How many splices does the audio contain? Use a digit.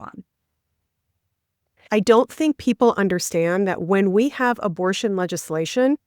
1